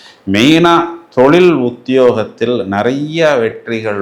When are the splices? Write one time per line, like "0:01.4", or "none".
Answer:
none